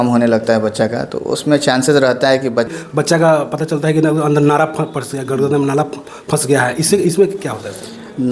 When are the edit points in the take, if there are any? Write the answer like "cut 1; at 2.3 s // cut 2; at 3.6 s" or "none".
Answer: cut 1; at 2.7 s